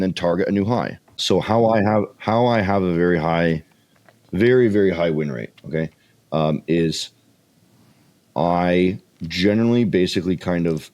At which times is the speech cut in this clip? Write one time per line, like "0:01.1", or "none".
0:01.2